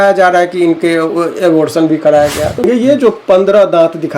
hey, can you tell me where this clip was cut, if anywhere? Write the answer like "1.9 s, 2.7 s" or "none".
2.6 s